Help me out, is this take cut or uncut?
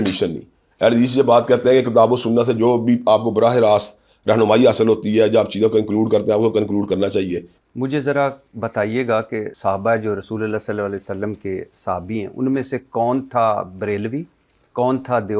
cut